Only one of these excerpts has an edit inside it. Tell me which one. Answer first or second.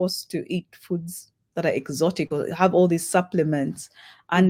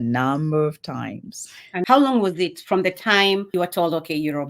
second